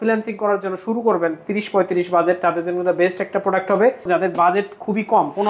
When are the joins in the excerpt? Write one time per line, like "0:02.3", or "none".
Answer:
0:04.1